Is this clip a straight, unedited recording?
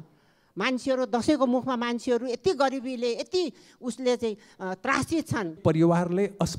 no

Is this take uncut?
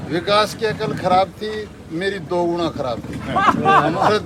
yes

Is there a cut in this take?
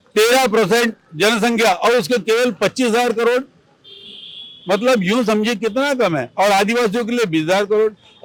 no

